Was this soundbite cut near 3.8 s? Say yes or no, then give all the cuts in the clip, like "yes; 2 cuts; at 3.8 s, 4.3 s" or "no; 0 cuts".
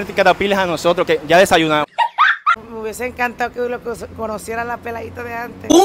no; 1 cut; at 2.5 s